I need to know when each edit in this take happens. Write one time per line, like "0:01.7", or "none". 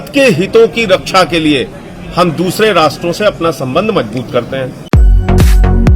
0:04.9